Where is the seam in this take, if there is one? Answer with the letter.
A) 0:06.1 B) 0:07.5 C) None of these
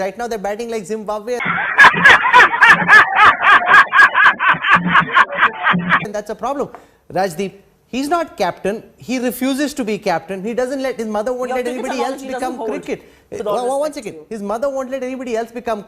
C